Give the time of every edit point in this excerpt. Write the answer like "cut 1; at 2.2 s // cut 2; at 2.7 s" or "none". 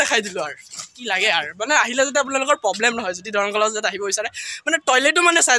none

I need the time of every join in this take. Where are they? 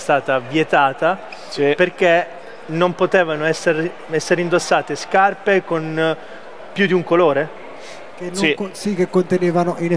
none

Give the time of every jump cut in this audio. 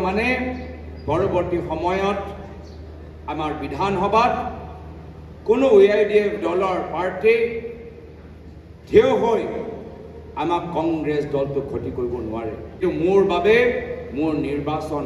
cut 1; at 12.8 s

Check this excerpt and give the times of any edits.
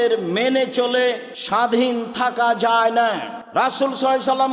cut 1; at 1.3 s // cut 2; at 3.3 s

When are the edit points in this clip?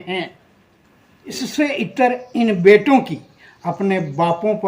cut 1; at 1.4 s

